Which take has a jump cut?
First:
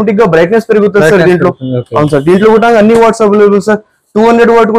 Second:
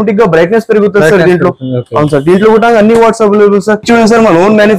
second; 1 cut; at 3.8 s

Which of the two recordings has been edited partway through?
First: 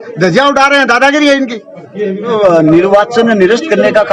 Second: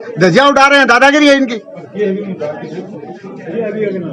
first; 1 cut; at 2.3 s

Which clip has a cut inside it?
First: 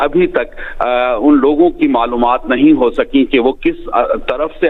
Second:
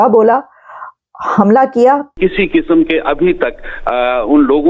second; 1 cut; at 2.1 s

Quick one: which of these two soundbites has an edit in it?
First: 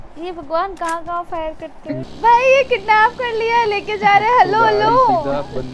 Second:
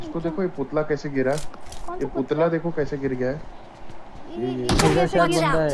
first; 1 cut; at 2.0 s

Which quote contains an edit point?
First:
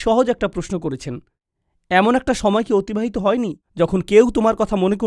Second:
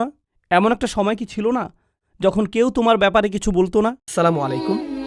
second; 1 cut; at 4.0 s

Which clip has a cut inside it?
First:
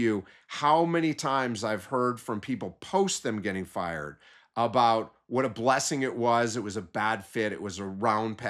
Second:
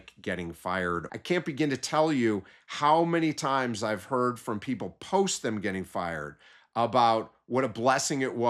second; 1 cut; at 1.1 s

